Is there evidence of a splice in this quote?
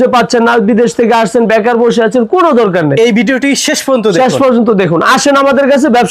no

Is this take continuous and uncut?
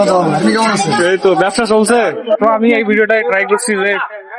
no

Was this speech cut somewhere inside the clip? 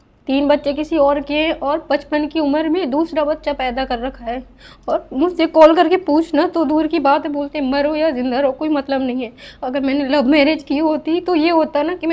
no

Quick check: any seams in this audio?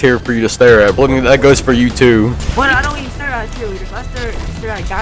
yes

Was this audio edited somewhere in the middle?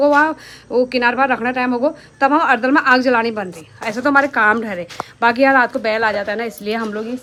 no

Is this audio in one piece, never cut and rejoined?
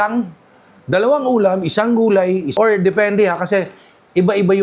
no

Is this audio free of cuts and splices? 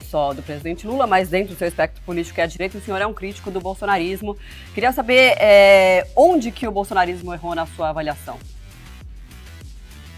yes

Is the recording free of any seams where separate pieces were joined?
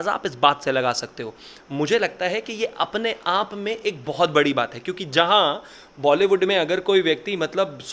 yes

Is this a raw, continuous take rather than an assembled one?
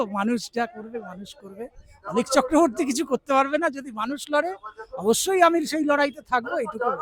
yes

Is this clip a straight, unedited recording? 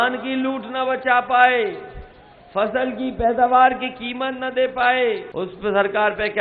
no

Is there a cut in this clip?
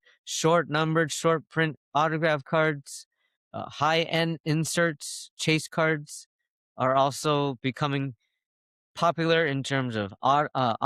no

